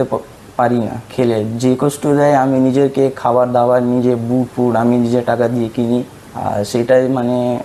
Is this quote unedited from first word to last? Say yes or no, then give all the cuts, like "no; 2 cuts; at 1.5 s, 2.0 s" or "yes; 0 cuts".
yes; 0 cuts